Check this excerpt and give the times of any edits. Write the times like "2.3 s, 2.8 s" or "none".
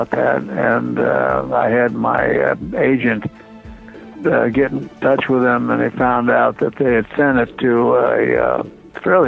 none